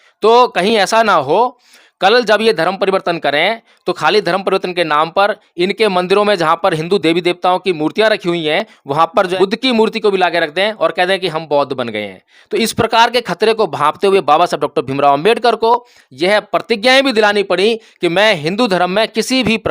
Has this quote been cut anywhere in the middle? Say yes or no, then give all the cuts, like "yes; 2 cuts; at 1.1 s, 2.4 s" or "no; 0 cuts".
yes; 1 cut; at 9.3 s